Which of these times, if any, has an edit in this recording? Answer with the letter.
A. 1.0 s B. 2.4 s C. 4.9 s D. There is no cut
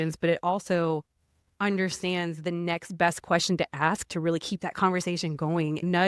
D